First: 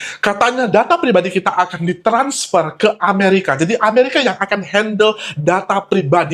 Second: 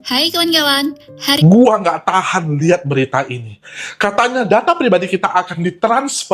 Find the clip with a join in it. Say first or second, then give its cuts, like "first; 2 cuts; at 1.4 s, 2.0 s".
second; 1 cut; at 1.4 s